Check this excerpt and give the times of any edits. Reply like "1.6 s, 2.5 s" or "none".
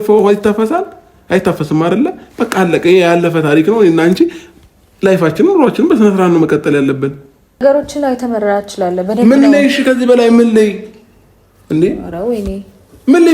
7.6 s